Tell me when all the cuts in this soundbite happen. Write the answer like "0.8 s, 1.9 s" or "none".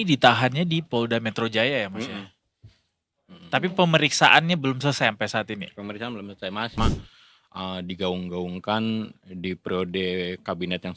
6.8 s